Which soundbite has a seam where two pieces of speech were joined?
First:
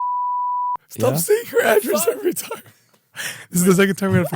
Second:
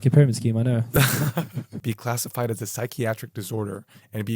second; 1 cut; at 1.8 s

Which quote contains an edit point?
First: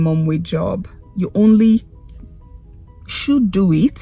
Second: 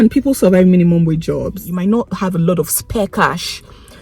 second; 1 cut; at 1.5 s

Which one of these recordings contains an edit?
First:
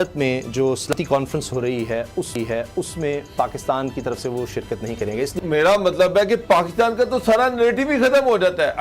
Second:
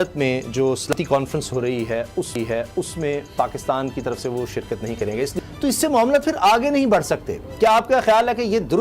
first; 1 cut; at 5.4 s

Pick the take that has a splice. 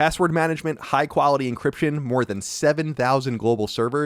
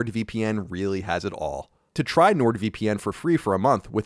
second; 1 cut; at 1.9 s

